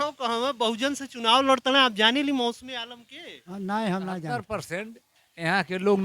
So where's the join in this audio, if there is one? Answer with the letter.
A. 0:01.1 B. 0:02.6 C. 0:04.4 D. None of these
C